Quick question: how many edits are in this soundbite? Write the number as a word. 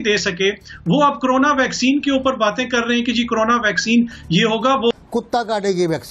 one